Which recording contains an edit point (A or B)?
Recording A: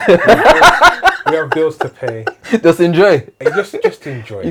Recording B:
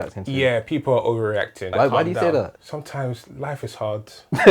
B